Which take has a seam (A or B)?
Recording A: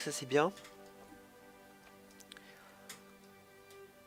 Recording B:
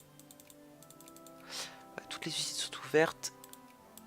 B